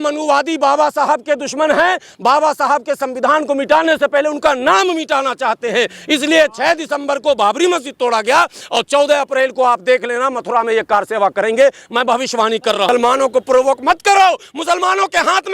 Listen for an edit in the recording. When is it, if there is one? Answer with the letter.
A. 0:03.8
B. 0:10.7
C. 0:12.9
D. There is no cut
C